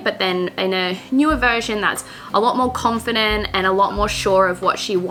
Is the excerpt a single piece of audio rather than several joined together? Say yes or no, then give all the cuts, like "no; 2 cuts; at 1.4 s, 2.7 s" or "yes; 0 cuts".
yes; 0 cuts